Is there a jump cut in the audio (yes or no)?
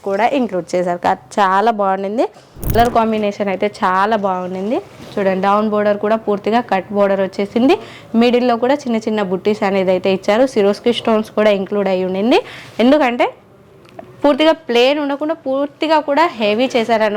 yes